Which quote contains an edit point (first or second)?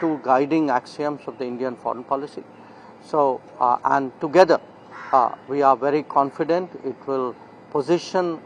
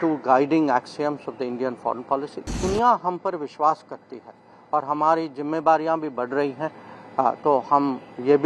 second